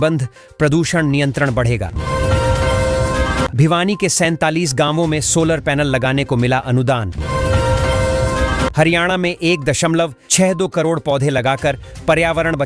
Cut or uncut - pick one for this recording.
uncut